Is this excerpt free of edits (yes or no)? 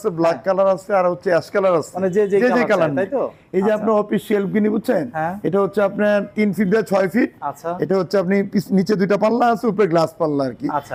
yes